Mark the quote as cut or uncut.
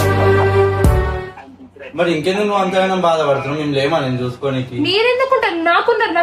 uncut